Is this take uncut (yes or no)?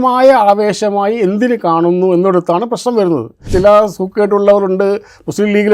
no